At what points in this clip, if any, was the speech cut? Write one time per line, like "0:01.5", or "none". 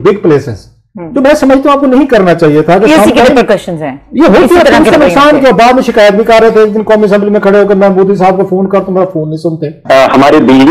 0:09.7